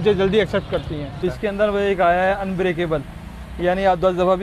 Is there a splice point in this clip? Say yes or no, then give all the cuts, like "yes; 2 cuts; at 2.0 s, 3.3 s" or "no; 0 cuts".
yes; 1 cut; at 1.2 s